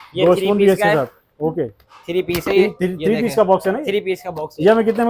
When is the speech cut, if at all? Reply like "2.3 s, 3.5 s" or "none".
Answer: none